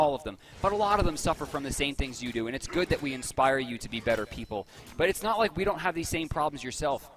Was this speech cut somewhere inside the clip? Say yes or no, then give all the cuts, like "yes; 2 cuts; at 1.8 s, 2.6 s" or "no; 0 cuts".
no; 0 cuts